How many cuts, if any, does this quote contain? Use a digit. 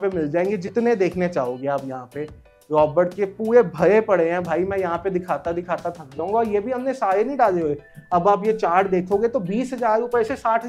1